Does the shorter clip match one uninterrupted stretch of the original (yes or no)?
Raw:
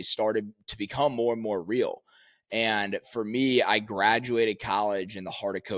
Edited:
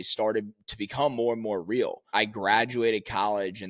no